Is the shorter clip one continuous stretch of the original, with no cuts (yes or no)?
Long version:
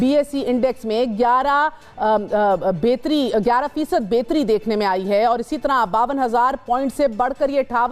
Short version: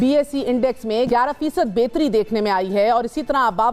no